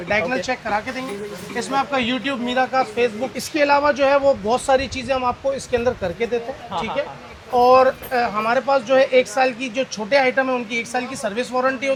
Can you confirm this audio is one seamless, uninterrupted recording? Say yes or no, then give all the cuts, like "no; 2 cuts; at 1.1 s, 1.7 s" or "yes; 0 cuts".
yes; 0 cuts